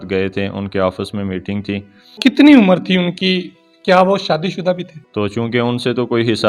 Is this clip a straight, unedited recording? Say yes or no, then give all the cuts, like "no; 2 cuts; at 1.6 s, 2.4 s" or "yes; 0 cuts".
no; 2 cuts; at 2.1 s, 5.0 s